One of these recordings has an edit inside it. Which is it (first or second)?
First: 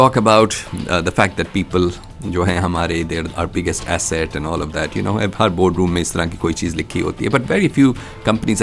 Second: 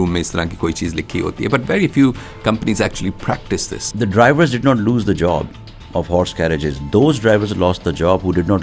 second